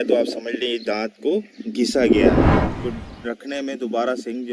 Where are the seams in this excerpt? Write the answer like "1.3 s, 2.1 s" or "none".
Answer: 2.6 s